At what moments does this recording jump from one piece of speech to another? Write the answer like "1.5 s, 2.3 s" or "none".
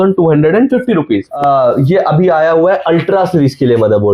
1.3 s

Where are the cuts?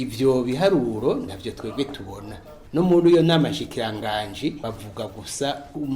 2.5 s, 4.6 s

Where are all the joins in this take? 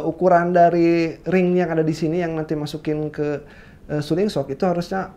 none

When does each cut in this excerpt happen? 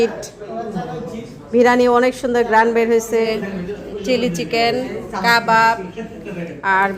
3.2 s

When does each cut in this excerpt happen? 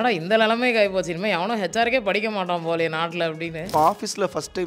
3.7 s

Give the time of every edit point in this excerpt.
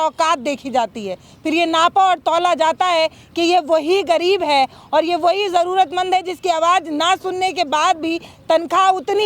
3.2 s

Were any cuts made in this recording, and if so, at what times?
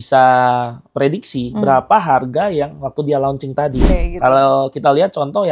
3.9 s

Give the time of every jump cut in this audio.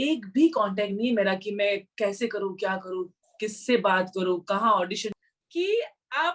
5.2 s

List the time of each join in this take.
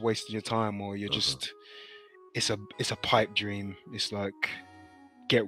none

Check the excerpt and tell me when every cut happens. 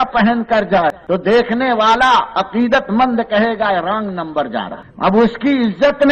1.0 s, 4.8 s

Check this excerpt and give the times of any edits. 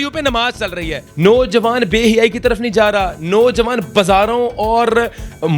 1.0 s

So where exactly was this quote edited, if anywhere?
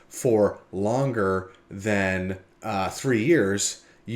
none

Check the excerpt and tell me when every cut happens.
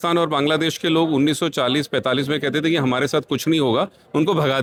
none

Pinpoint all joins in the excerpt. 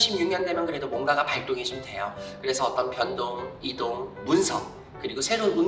none

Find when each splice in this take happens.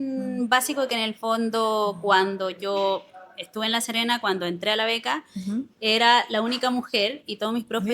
none

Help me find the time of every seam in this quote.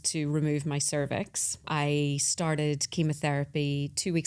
1.6 s

